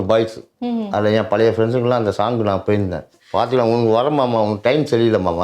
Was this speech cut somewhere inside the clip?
yes; 1 cut; at 3.1 s

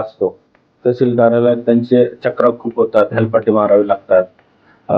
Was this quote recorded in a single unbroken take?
yes; 0 cuts

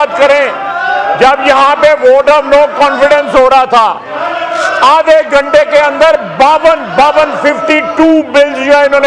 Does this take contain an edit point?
no; 0 cuts

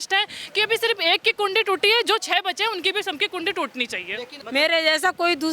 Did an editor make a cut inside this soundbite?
yes; 1 cut; at 4.4 s

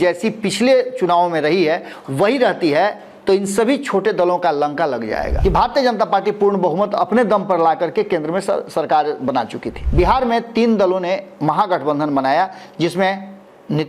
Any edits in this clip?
yes; 2 cuts; at 5.3 s, 9.8 s

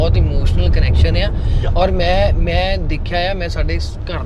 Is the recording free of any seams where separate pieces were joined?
yes; 0 cuts

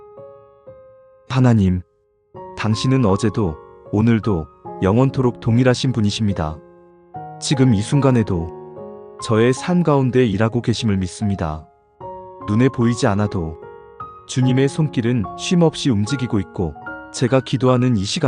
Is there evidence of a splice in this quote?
yes; 1 cut; at 1.3 s

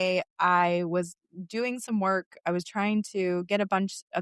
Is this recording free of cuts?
yes; 0 cuts

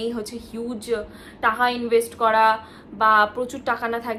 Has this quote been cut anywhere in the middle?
no; 0 cuts

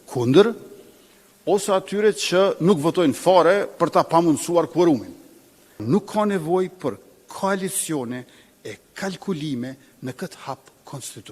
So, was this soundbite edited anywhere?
yes; 1 cut; at 5.8 s

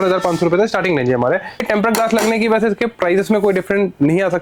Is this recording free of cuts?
no; 1 cut; at 1.6 s

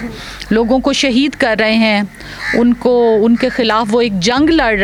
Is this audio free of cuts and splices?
yes; 0 cuts

